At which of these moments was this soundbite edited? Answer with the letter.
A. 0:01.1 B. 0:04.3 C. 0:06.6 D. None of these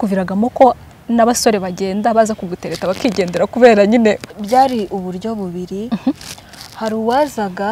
B